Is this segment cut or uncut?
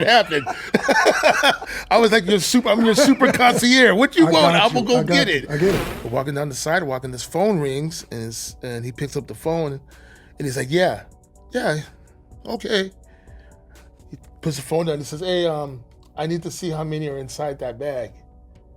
cut